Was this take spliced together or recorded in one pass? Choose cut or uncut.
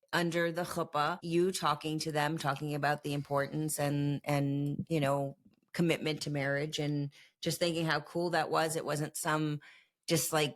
cut